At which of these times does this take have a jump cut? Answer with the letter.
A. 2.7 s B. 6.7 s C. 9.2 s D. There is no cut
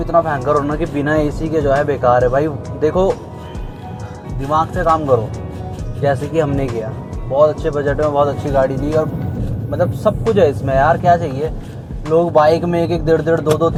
D